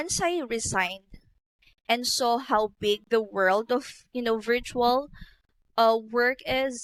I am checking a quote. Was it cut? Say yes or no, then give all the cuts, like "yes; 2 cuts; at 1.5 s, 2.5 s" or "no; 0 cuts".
no; 0 cuts